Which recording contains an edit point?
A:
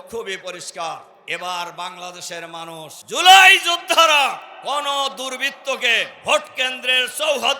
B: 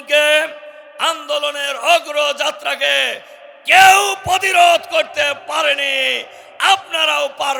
A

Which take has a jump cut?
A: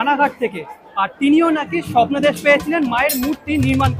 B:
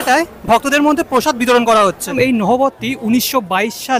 B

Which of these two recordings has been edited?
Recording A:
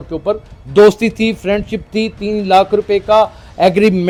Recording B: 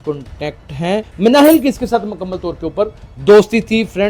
B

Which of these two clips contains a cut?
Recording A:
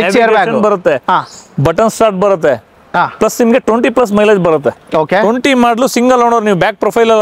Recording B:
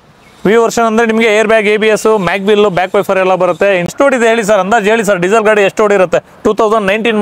B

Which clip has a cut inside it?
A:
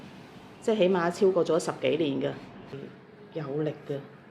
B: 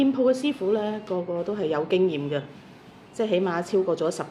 A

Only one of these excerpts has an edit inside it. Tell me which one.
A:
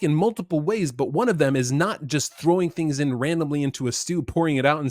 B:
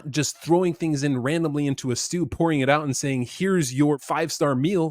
B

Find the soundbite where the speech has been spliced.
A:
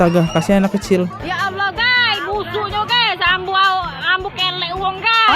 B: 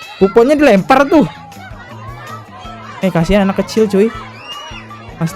A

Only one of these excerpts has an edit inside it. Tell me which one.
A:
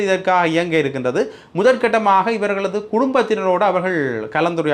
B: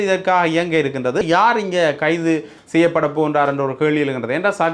B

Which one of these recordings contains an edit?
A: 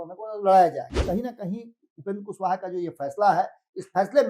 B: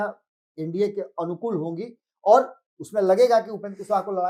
A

